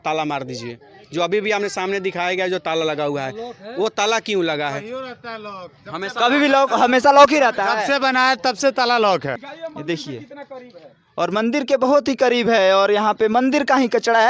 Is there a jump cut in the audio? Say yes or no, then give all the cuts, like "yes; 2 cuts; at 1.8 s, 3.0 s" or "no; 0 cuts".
no; 0 cuts